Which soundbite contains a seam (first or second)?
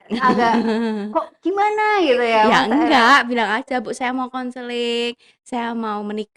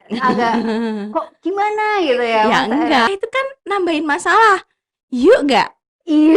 second